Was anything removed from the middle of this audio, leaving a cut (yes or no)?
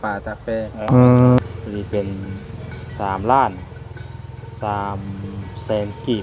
yes